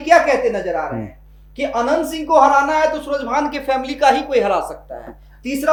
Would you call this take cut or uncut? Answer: uncut